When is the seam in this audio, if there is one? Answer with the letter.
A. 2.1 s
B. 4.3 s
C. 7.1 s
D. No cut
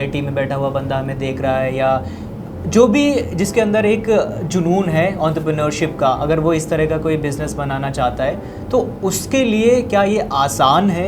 D